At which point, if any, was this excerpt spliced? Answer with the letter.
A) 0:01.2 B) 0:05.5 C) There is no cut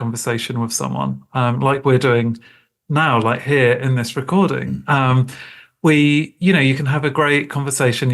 C